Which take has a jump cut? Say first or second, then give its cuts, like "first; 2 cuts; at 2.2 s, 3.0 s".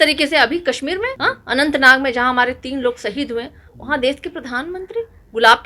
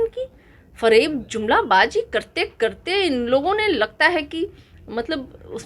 first; 1 cut; at 1.1 s